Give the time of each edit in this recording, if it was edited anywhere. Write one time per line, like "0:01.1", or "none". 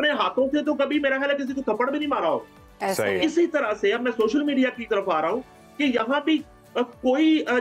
none